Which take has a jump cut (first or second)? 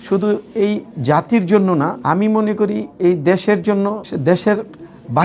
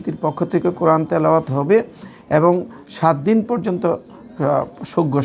first